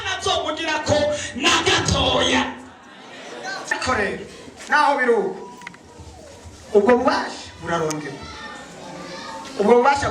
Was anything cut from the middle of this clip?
yes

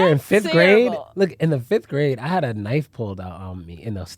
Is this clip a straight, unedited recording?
yes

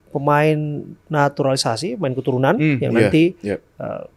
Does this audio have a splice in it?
no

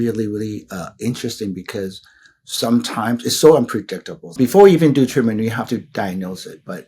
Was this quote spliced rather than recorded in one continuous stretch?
yes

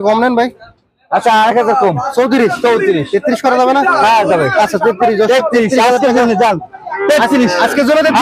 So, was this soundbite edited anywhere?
no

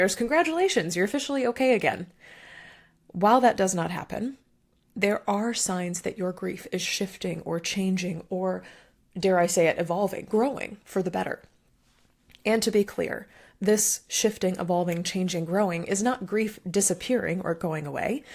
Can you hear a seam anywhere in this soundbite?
no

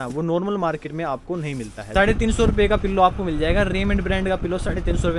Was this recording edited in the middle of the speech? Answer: yes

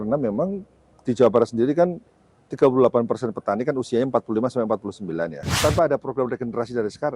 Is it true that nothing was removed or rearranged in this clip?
no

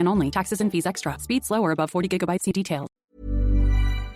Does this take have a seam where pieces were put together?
yes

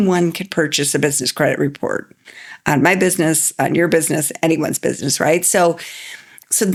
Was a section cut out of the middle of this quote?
no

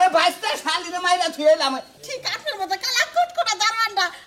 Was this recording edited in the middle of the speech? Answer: yes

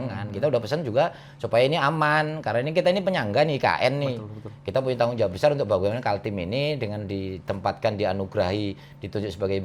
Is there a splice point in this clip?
no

